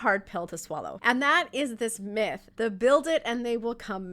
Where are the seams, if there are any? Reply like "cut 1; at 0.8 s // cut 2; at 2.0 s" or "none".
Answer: cut 1; at 0.9 s // cut 2; at 2.4 s